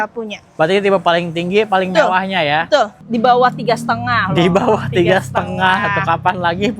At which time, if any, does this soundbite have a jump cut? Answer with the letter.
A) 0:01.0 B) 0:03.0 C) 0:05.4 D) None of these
B